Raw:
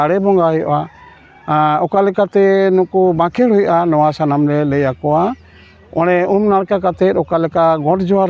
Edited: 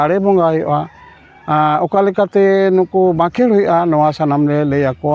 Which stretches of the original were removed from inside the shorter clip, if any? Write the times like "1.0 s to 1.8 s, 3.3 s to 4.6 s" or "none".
none